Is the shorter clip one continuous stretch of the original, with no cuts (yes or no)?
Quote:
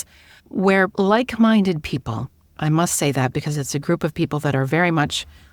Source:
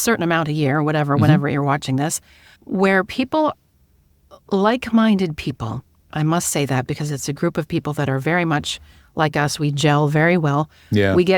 no